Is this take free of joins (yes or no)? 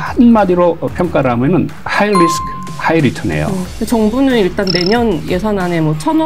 no